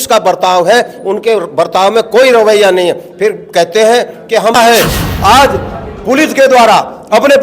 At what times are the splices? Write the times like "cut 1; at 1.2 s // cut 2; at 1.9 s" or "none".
cut 1; at 4.6 s